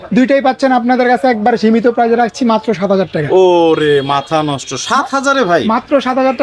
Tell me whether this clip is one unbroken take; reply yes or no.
yes